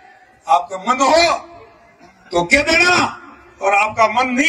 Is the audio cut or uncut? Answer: uncut